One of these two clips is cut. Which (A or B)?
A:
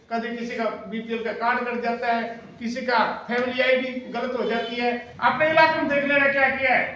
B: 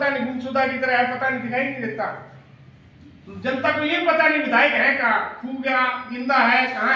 A